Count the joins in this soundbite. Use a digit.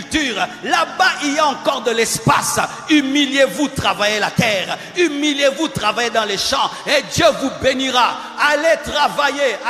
0